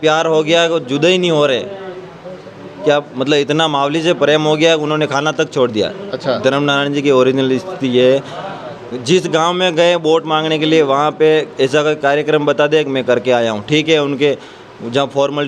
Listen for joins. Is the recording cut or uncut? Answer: uncut